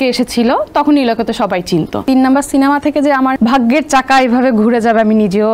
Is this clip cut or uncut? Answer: cut